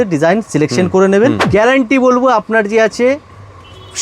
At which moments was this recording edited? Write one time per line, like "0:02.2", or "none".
0:01.4